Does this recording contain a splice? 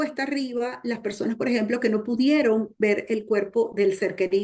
no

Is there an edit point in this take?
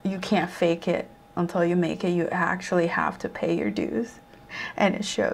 no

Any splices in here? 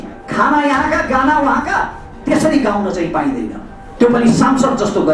no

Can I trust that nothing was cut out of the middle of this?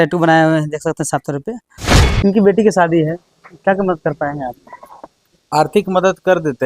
no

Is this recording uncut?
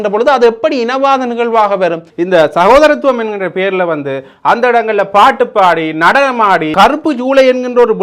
no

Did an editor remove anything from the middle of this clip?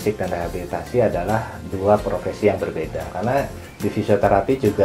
yes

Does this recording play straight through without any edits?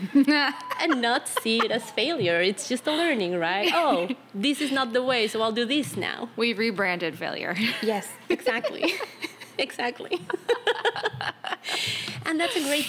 yes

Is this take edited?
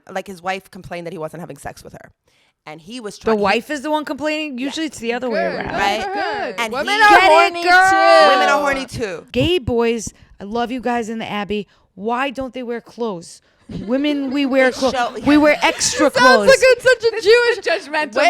yes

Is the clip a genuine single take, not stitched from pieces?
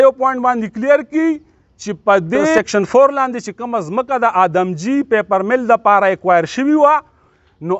no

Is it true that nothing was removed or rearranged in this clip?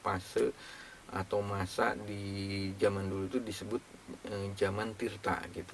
yes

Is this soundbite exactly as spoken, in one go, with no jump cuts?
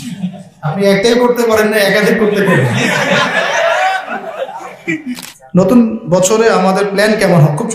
no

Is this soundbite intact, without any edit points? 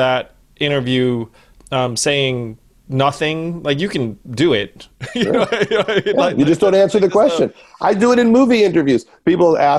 yes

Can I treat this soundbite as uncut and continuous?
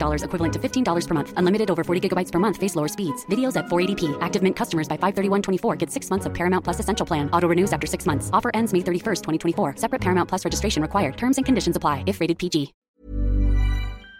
no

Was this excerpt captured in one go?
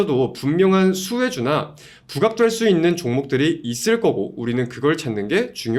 yes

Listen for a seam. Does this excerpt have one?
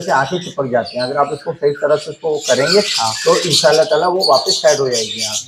no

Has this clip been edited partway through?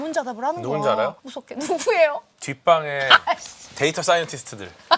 no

